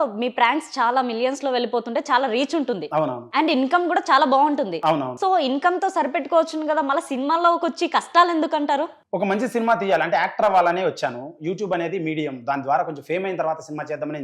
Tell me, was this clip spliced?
no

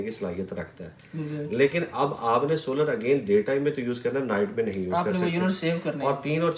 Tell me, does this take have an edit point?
no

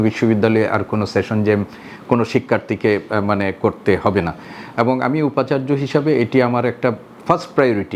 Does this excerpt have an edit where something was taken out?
no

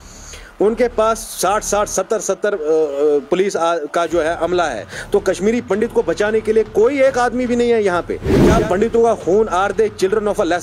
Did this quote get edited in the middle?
yes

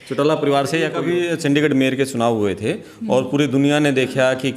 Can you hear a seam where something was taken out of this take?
yes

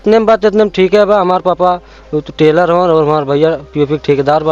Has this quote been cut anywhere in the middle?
no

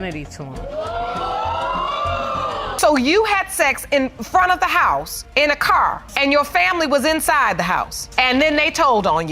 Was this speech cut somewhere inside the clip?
yes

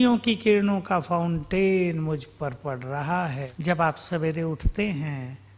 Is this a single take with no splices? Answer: no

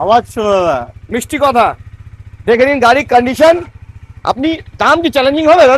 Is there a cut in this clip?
no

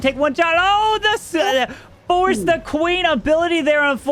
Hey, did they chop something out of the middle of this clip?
no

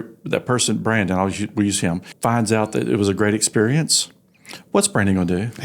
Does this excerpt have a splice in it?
yes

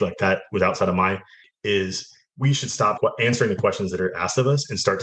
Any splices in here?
yes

